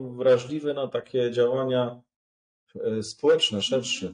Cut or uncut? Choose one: uncut